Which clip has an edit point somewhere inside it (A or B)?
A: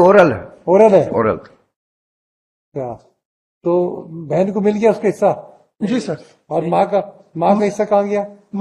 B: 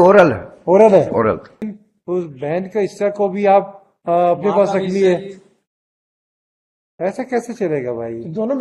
B